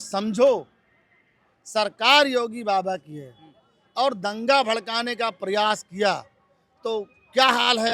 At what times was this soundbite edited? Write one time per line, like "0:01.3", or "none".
none